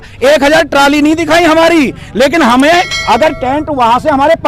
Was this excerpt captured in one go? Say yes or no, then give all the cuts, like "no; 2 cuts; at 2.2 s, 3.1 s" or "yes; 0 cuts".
yes; 0 cuts